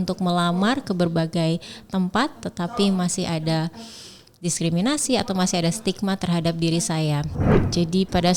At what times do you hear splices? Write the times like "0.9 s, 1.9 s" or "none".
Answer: 7.4 s